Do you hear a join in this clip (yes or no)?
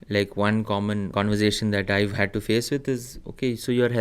yes